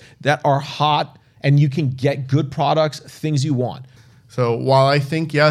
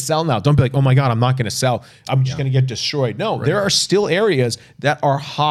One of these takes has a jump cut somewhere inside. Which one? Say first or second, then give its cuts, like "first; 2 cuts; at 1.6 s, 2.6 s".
first; 1 cut; at 3.9 s